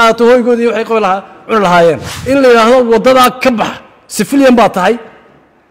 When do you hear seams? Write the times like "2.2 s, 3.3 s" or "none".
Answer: 2.1 s